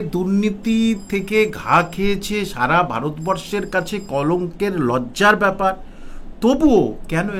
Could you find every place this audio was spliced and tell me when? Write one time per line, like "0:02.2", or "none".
none